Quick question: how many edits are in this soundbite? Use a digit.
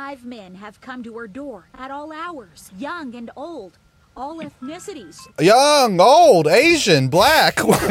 2